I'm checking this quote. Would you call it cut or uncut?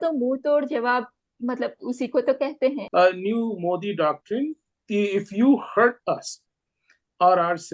cut